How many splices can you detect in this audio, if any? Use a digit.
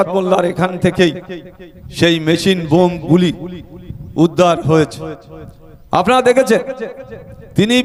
0